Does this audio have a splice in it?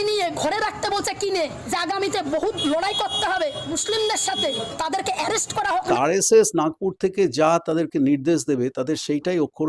yes; 4 cuts; at 1.6 s, 3.7 s, 4.7 s, 5.9 s

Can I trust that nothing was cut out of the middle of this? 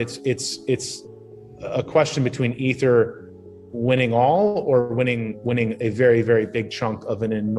yes; 0 cuts

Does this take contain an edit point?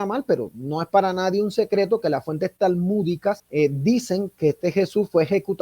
yes; 1 cut; at 3.4 s

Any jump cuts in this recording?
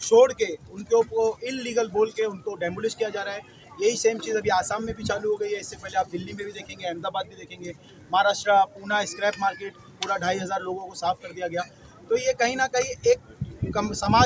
no; 0 cuts

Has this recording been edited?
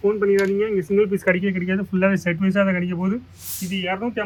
no; 0 cuts

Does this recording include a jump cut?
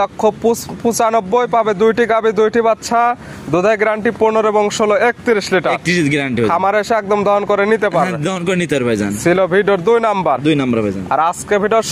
no; 0 cuts

